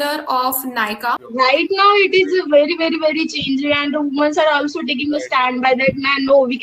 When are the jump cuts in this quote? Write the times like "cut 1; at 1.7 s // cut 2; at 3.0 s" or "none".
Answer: cut 1; at 1.2 s